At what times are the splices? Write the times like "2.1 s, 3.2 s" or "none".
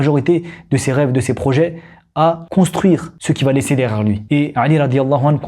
2.4 s, 3.1 s

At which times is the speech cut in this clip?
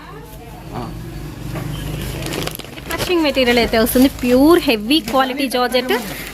3.0 s

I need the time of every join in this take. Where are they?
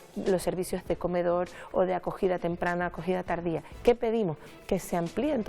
3.7 s

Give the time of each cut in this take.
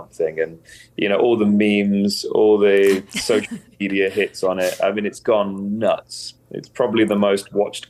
none

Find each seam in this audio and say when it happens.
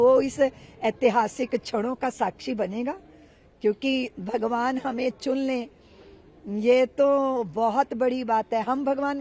none

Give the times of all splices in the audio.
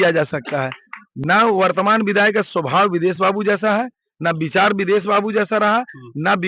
none

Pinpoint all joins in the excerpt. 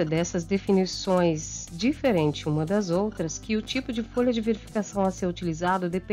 none

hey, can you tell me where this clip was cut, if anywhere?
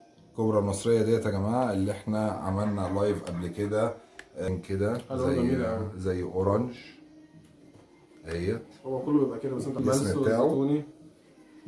4.5 s, 9.8 s

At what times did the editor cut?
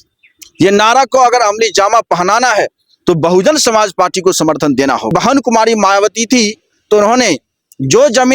5.1 s

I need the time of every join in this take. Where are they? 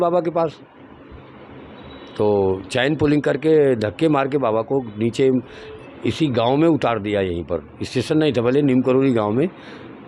none

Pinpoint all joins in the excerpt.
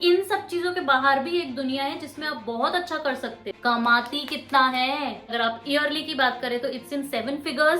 3.5 s, 5.3 s

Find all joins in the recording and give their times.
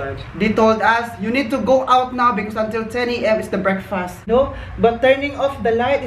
4.3 s

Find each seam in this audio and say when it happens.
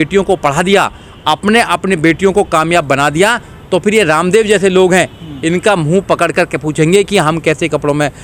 none

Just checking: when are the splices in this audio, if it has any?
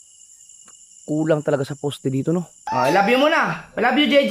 2.6 s

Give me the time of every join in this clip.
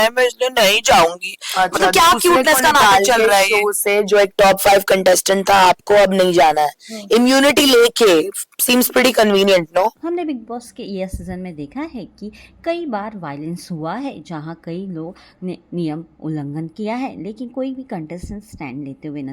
none

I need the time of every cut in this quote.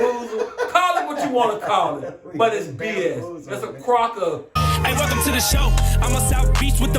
4.6 s

